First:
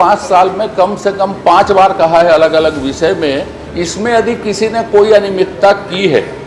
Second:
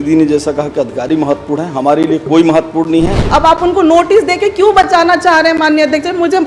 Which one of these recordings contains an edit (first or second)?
second